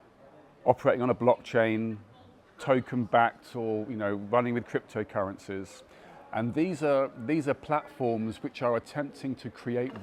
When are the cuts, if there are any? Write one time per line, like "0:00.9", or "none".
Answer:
none